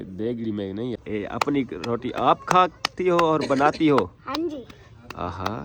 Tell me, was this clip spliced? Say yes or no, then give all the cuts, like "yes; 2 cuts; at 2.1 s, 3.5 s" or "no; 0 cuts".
yes; 1 cut; at 1.0 s